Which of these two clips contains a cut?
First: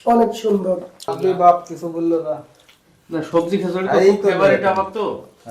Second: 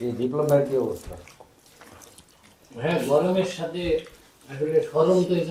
first; 1 cut; at 1.1 s

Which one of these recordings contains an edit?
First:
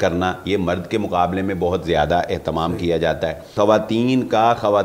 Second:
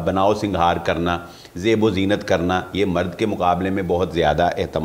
first; 1 cut; at 3.5 s

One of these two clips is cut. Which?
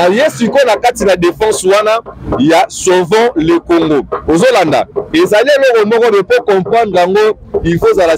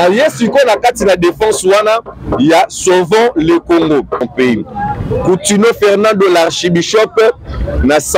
second; 1 cut; at 4.2 s

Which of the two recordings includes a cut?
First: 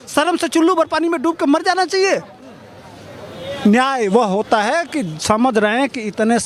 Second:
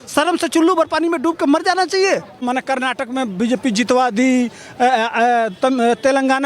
second; 1 cut; at 2.4 s

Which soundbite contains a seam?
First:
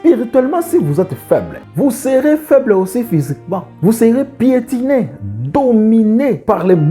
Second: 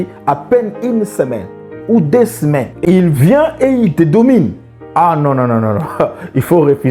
first; 1 cut; at 1.6 s

